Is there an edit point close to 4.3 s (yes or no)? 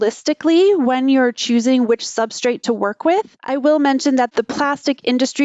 yes